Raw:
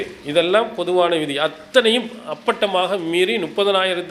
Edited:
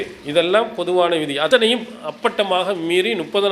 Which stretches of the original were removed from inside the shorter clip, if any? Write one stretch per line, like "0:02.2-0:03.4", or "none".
0:01.5-0:01.7